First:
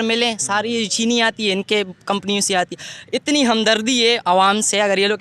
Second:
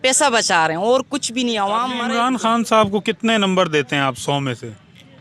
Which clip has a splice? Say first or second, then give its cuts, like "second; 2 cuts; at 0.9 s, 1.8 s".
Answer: second; 1 cut; at 1.9 s